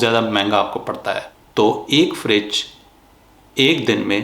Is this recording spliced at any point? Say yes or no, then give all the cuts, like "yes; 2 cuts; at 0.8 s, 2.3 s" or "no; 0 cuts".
yes; 1 cut; at 1.2 s